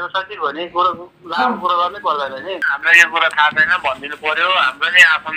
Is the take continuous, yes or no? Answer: yes